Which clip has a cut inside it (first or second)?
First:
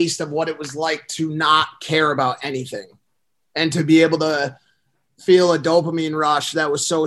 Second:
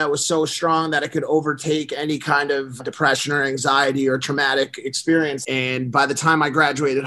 second